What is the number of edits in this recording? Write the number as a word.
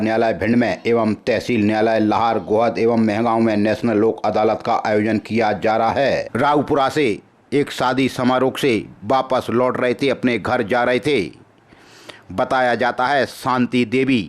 one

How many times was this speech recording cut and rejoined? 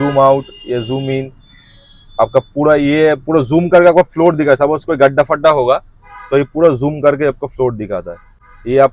zero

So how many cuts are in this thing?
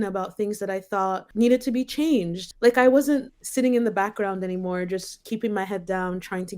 three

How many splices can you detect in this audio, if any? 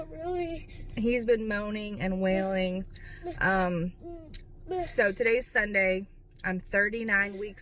zero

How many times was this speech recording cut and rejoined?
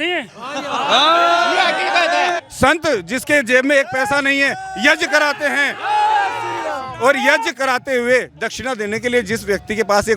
one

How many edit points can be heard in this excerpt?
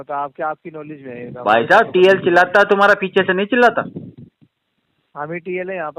zero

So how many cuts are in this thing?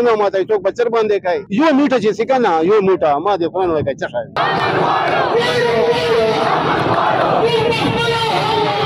one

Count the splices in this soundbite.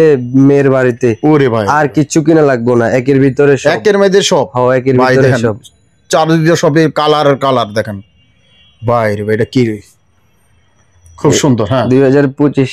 zero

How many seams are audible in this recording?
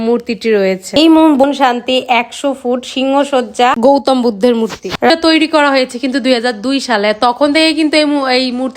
two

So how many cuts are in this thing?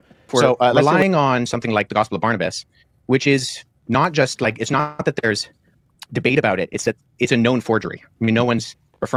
zero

